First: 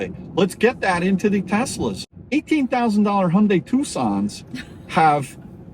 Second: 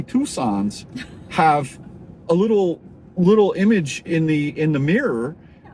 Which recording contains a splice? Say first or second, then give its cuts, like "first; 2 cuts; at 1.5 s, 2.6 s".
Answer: first; 1 cut; at 2.1 s